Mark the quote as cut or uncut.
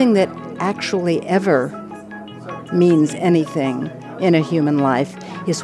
uncut